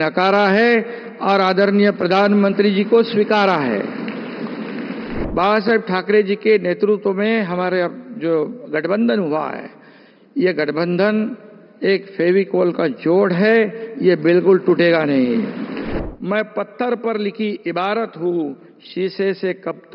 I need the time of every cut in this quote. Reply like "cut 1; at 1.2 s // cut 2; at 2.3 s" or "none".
cut 1; at 5.2 s // cut 2; at 16.0 s